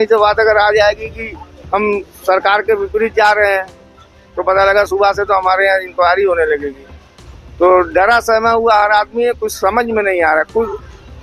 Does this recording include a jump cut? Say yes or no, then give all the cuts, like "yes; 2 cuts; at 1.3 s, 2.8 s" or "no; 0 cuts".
no; 0 cuts